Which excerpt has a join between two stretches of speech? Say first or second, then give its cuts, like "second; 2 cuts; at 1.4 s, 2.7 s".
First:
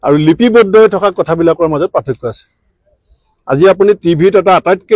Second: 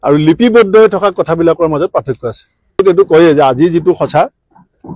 second; 1 cut; at 2.8 s